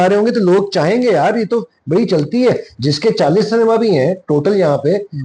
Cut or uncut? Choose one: uncut